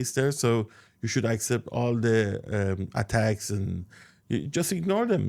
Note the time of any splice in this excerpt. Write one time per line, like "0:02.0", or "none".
none